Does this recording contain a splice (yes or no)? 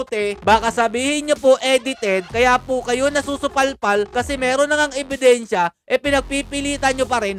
no